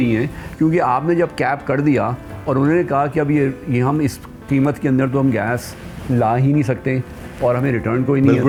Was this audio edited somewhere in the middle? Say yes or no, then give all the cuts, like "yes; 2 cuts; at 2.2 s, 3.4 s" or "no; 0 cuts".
no; 0 cuts